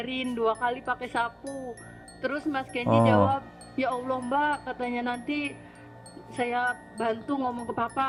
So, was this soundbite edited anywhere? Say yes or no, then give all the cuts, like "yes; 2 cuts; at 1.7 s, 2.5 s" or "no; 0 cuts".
no; 0 cuts